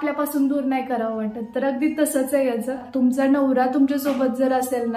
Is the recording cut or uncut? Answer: cut